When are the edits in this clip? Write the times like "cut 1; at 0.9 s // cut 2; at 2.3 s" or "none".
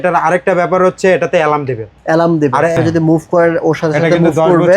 cut 1; at 2.7 s